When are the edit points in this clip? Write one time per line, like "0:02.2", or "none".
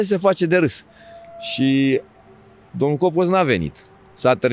none